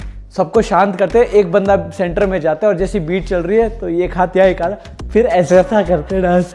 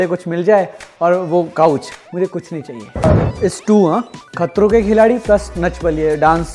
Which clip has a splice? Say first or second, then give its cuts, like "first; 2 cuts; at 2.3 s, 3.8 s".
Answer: second; 1 cut; at 3.0 s